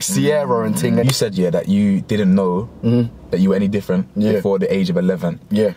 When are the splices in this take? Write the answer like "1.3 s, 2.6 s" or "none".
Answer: 1.1 s